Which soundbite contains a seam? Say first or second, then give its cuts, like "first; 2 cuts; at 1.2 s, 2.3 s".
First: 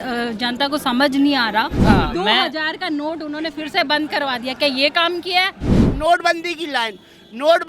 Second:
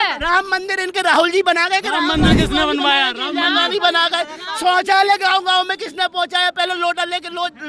first; 2 cuts; at 1.7 s, 5.9 s